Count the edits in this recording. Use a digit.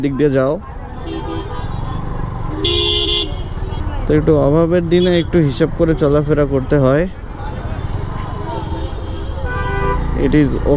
0